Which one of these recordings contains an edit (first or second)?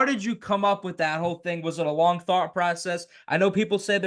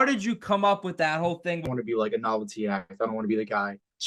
second